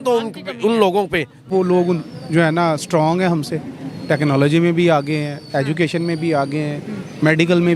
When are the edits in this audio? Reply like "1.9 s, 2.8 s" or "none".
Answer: 1.5 s